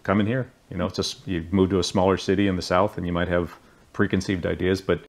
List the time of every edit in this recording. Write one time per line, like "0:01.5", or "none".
none

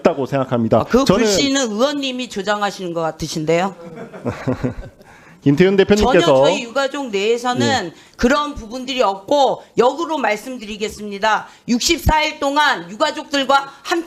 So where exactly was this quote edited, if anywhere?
none

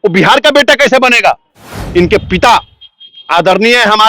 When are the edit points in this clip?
0:01.8

